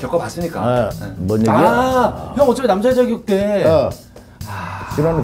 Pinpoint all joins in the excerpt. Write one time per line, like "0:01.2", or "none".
none